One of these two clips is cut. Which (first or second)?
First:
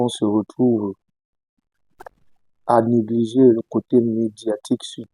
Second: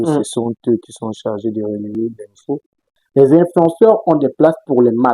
second